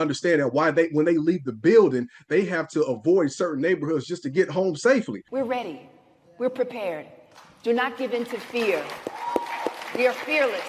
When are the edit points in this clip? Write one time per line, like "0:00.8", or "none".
0:05.3